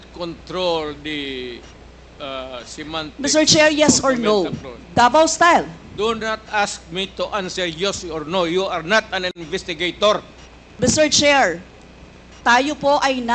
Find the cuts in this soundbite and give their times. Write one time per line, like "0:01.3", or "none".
none

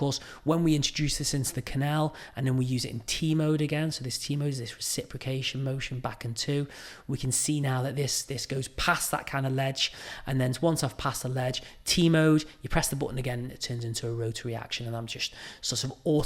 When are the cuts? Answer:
none

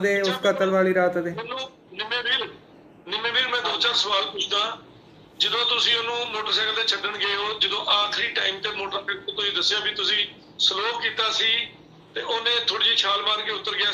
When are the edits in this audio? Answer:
none

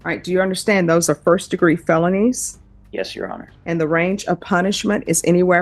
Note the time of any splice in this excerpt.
0:03.5

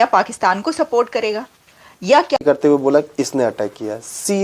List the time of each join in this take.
0:02.4

